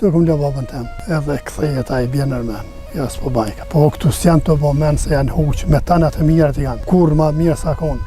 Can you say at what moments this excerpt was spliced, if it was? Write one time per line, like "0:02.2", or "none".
0:00.9
0:03.6
0:06.7